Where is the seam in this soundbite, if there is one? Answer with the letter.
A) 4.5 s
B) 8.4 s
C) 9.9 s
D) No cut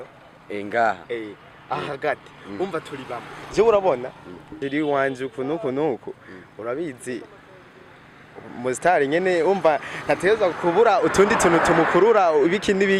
A